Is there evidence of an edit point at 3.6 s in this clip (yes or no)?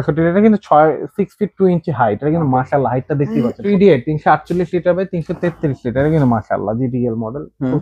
yes